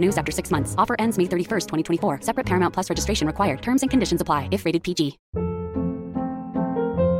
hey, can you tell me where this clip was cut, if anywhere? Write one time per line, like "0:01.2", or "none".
0:05.2